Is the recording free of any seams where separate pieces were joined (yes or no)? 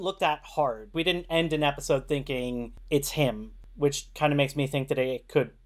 no